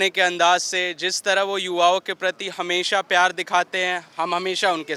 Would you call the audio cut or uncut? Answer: uncut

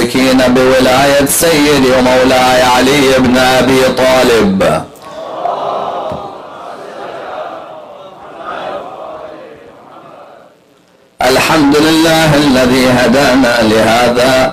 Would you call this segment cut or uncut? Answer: uncut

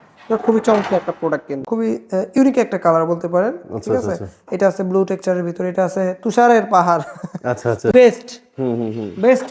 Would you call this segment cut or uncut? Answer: cut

